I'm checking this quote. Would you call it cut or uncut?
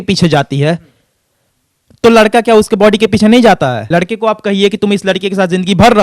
cut